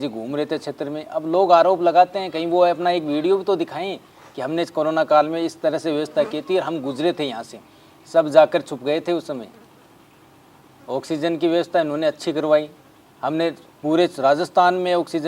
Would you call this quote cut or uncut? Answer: uncut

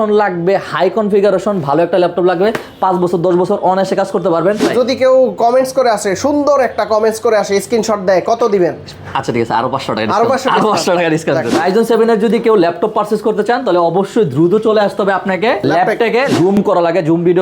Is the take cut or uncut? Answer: cut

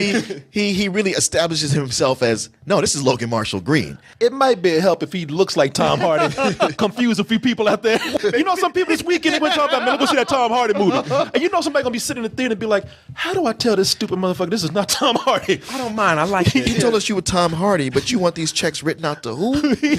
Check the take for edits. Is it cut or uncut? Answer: cut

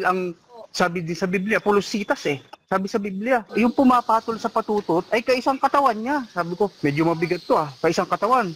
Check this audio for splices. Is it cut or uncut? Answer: cut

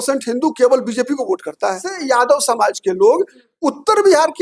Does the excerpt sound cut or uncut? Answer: cut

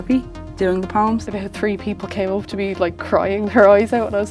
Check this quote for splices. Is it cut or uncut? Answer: cut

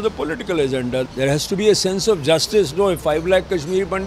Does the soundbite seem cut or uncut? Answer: cut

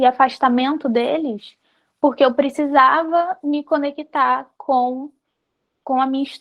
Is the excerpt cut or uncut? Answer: uncut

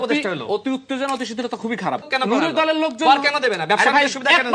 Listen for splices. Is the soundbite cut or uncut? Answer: cut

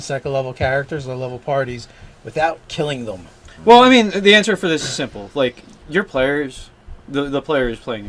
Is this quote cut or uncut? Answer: cut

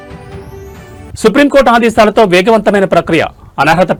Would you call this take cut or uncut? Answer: uncut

